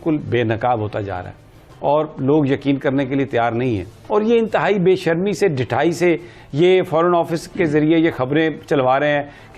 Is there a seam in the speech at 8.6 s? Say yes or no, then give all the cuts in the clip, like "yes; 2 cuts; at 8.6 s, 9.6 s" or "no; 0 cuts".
no; 1 cut; at 3.9 s